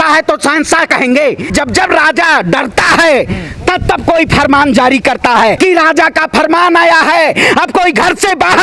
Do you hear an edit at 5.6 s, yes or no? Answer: yes